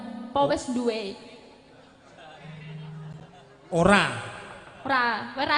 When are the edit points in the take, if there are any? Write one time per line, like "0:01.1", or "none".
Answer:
none